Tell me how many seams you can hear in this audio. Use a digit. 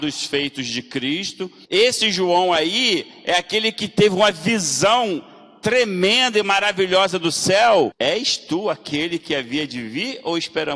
2